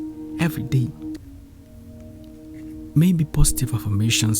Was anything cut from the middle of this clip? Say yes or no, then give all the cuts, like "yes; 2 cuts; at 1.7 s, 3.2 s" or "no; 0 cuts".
yes; 1 cut; at 1.2 s